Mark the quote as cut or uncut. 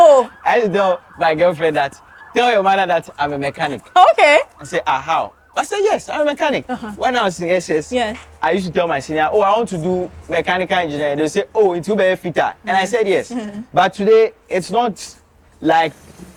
uncut